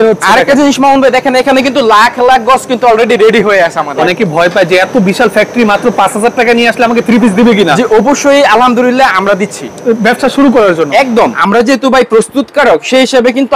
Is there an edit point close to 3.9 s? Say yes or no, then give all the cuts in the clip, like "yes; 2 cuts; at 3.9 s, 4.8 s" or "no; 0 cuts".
yes; 2 cuts; at 3.9 s, 11.4 s